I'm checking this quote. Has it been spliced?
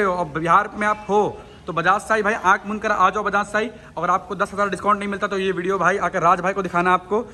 no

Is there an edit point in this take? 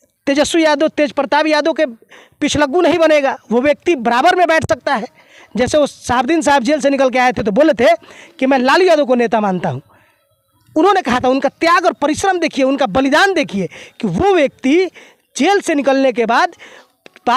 no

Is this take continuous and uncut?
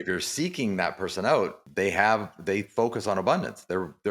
no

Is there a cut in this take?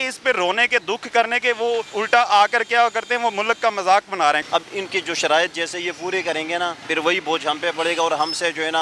yes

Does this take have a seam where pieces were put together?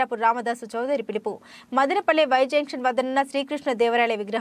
no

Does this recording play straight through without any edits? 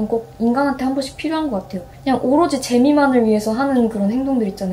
no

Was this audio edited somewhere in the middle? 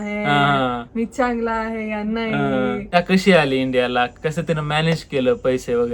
yes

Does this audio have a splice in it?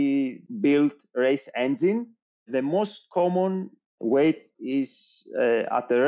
yes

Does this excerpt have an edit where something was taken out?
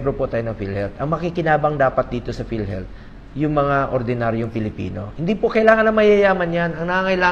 no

